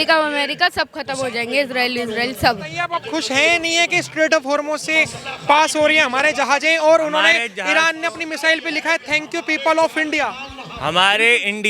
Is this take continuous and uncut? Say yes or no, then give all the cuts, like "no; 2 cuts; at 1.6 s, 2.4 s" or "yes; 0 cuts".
no; 1 cut; at 2.8 s